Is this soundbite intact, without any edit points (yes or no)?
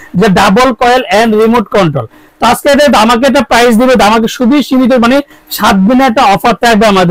yes